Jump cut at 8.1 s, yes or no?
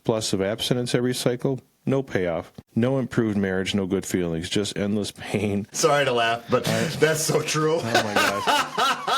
no